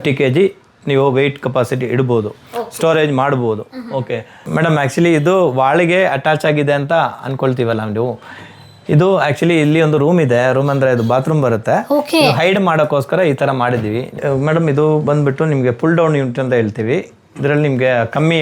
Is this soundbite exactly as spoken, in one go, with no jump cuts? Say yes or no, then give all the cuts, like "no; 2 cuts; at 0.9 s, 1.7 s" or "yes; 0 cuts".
no; 2 cuts; at 4.4 s, 14.2 s